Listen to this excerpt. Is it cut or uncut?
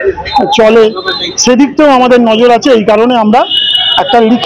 uncut